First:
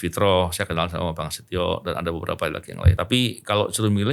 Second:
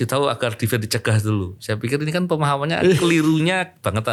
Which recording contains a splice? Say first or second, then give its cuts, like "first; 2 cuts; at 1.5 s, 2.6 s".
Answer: first; 1 cut; at 2.9 s